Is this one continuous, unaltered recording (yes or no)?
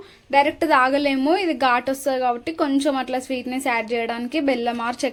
yes